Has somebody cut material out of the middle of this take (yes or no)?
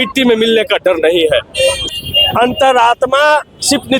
yes